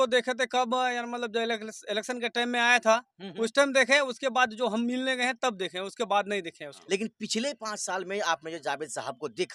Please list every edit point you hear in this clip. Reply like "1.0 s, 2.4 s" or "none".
6.7 s